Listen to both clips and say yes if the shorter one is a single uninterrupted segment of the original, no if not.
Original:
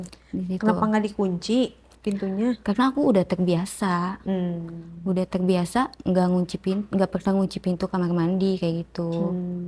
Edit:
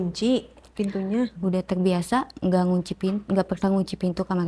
no